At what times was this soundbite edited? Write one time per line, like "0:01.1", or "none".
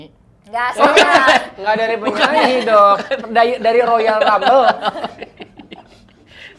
none